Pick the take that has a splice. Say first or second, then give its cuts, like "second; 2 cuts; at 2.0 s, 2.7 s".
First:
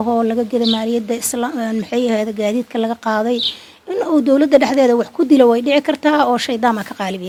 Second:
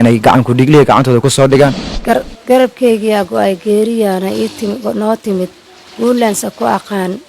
second; 1 cut; at 1.9 s